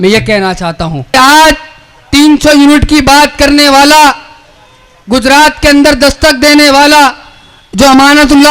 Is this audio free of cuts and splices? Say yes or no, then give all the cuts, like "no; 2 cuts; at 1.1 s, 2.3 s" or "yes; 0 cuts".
no; 1 cut; at 1.1 s